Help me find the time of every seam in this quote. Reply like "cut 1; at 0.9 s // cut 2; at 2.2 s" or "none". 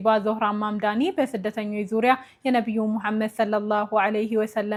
none